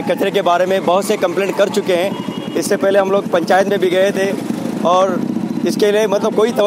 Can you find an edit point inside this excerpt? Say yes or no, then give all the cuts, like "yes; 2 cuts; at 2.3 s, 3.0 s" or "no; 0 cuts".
no; 0 cuts